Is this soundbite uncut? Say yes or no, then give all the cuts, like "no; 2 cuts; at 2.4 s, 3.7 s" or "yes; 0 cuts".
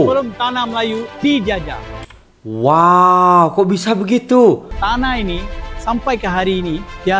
no; 1 cut; at 4.7 s